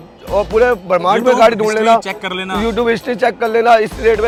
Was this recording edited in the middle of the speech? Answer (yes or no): no